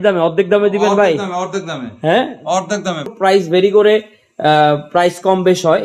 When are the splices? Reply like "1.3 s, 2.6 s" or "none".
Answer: 3.1 s